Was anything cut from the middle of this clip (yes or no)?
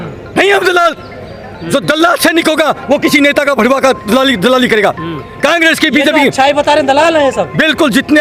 no